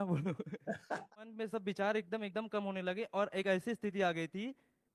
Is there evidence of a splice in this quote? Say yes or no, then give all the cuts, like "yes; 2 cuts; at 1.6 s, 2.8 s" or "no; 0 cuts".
yes; 1 cut; at 1.2 s